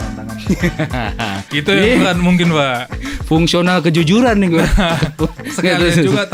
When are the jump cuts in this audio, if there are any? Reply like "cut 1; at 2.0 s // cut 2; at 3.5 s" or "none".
none